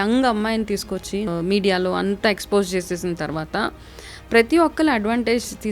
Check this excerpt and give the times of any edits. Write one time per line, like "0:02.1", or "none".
0:01.3

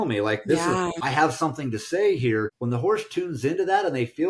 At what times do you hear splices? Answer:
0:01.0
0:02.6

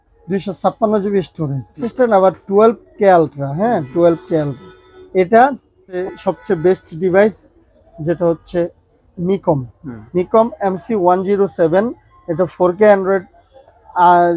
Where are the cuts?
0:01.9
0:06.0

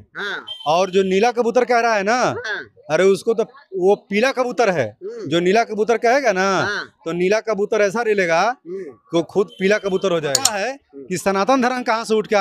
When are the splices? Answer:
0:10.5

